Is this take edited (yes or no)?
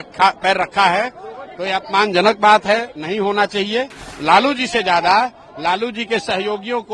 yes